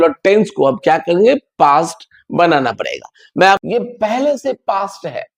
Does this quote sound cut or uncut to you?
cut